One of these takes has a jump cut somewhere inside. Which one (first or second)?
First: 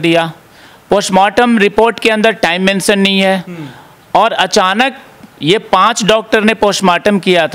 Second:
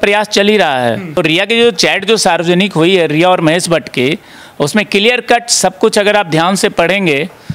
second